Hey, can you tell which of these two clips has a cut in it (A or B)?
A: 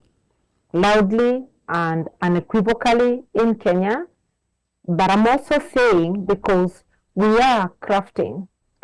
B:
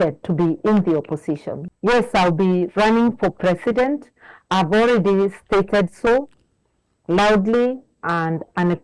B